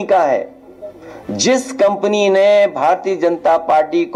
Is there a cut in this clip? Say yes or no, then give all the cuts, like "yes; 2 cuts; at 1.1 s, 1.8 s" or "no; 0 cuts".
no; 0 cuts